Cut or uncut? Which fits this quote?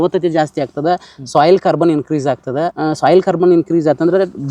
cut